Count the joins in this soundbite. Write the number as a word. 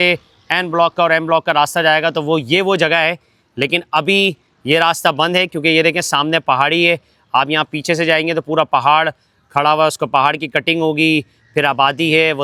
zero